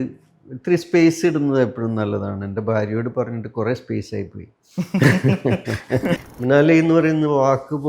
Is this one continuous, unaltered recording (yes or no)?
no